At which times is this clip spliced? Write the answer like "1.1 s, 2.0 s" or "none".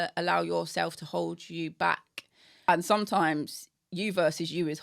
2.7 s

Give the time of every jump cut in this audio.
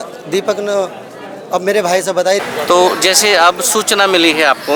2.4 s

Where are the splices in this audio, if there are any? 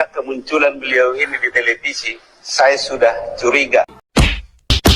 4.0 s

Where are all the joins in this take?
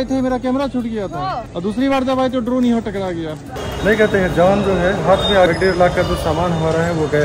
3.6 s, 5.5 s

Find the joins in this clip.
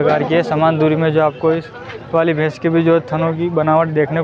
none

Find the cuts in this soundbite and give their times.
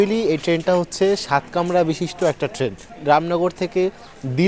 3.0 s

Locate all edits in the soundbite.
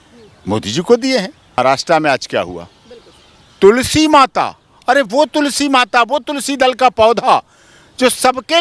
1.6 s

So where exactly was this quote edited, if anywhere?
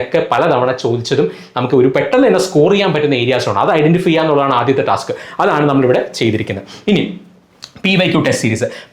none

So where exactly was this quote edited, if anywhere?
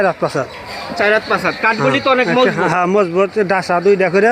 none

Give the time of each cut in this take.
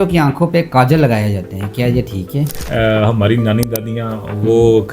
2.6 s

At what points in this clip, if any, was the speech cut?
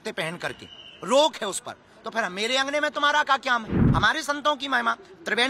3.8 s

